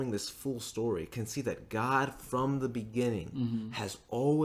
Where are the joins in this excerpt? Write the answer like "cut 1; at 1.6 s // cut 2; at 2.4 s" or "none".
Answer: none